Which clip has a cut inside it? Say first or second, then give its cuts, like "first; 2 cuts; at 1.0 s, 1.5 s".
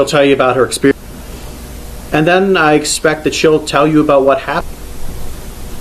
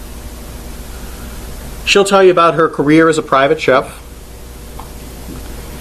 first; 2 cuts; at 0.9 s, 4.6 s